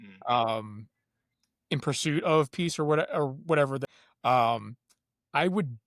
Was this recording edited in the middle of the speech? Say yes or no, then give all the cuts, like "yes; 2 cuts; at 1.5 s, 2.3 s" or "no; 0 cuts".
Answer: yes; 1 cut; at 3.8 s